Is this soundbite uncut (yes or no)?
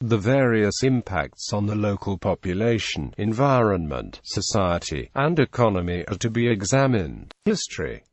no